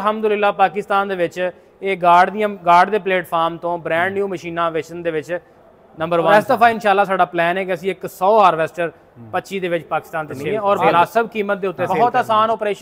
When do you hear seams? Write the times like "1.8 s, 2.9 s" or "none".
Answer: 6.3 s, 10.4 s, 11.9 s